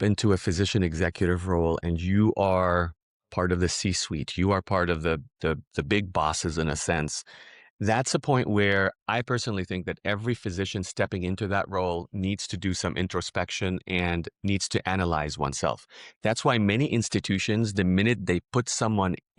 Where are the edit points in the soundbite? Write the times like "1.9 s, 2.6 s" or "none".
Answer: none